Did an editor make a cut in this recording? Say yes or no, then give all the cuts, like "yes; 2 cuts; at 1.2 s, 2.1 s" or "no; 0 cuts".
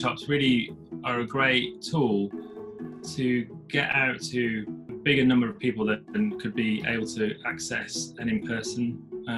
yes; 2 cuts; at 1.8 s, 4.8 s